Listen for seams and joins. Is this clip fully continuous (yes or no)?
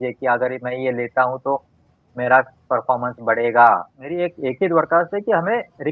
no